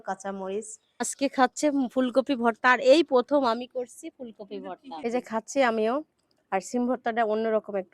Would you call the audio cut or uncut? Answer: cut